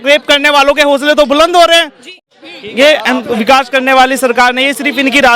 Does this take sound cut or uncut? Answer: cut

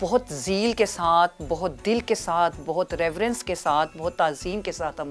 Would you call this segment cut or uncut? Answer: uncut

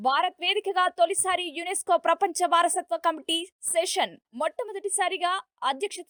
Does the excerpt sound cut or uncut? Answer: uncut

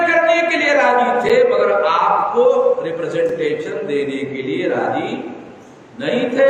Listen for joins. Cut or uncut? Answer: uncut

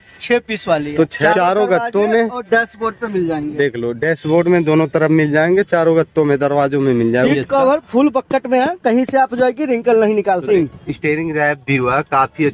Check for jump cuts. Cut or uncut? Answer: cut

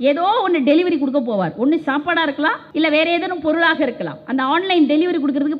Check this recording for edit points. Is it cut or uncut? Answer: cut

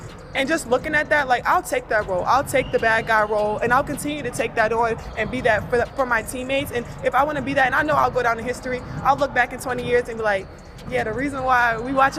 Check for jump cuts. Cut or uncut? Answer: uncut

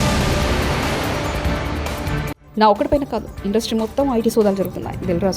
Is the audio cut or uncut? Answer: cut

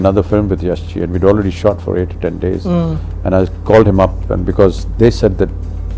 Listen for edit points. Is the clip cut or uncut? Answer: uncut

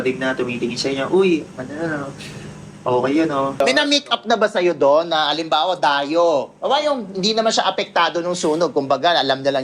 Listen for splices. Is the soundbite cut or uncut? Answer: cut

